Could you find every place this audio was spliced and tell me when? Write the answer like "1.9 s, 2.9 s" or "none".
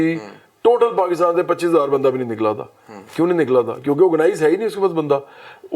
none

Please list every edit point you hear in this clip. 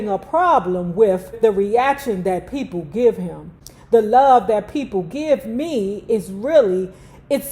1.3 s

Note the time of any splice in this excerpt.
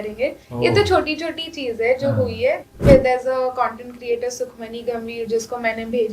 2.7 s

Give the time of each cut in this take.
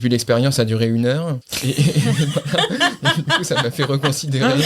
1.5 s

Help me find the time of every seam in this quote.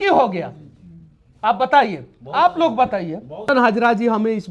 3.5 s

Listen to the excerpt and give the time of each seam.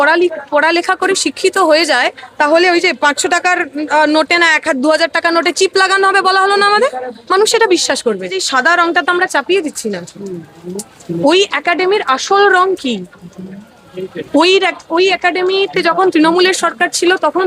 8.4 s

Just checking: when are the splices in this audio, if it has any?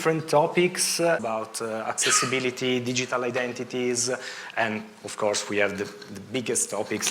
1.2 s

